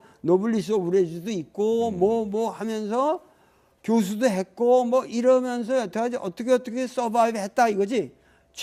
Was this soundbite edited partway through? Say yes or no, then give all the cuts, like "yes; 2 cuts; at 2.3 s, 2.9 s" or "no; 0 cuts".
no; 0 cuts